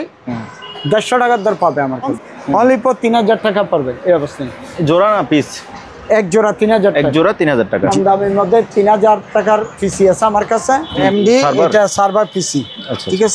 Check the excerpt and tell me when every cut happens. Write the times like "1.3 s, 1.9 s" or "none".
2.1 s, 7.9 s, 11.0 s